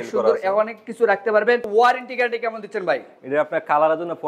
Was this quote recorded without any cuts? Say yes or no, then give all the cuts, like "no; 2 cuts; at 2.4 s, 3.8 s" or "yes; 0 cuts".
no; 1 cut; at 1.7 s